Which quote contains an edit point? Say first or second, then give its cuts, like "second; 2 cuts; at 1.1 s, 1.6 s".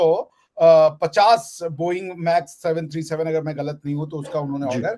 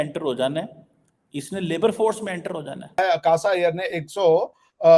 second; 1 cut; at 3.0 s